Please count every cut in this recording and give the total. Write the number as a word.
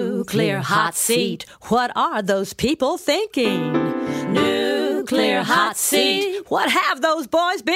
zero